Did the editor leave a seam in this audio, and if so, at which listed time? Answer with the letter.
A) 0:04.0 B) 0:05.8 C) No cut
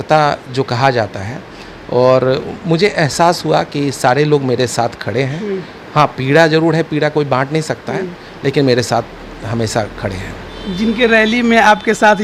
C